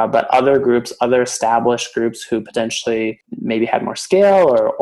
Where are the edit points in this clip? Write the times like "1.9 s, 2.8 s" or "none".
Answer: 3.3 s